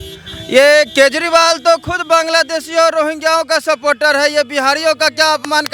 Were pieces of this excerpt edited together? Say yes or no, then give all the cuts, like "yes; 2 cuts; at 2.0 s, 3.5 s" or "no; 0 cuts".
no; 0 cuts